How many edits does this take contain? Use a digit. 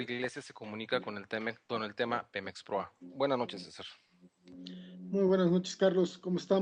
0